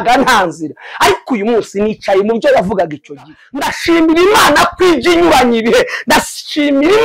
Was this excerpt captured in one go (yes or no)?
no